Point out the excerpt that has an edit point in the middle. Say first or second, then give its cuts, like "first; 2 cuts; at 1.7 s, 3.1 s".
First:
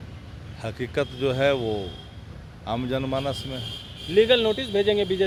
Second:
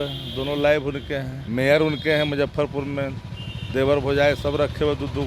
second; 1 cut; at 1.4 s